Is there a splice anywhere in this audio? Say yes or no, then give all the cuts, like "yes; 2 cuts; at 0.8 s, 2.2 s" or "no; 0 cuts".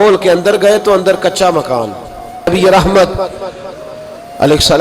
yes; 1 cut; at 2.5 s